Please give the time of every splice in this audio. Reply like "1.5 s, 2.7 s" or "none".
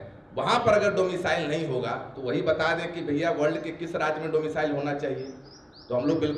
none

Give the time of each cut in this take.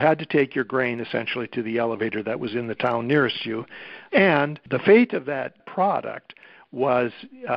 4.6 s, 5.6 s

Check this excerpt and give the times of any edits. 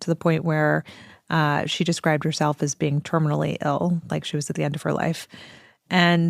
none

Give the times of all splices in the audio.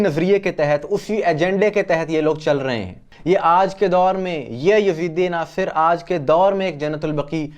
3.1 s

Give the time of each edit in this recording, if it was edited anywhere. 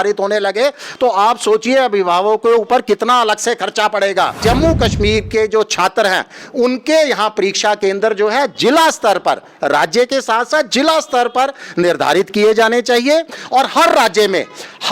4.4 s

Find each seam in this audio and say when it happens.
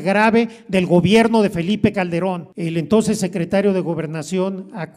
2.5 s

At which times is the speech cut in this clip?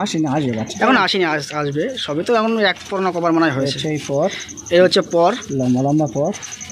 none

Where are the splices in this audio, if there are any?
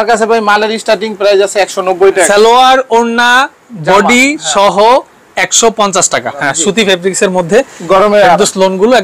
2.3 s, 6.4 s

